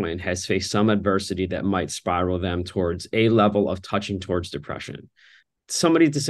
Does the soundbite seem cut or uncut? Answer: cut